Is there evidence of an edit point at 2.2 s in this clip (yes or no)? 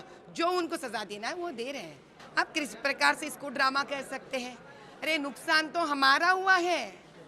yes